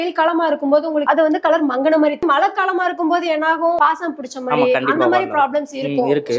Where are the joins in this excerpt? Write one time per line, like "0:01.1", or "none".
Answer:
0:01.0
0:02.2
0:03.8